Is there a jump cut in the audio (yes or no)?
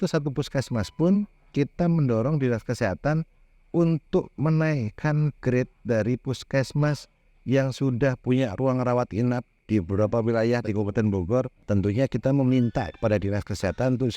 yes